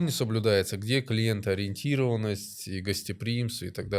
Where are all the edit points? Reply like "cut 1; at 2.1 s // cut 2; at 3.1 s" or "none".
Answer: none